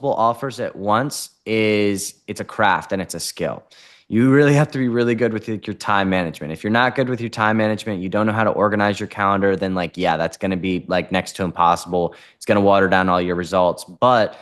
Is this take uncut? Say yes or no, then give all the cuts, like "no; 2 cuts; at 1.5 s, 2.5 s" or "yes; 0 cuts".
yes; 0 cuts